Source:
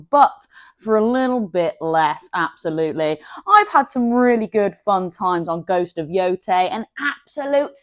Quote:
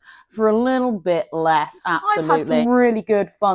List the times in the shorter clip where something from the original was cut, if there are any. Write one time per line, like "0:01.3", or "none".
0:02.5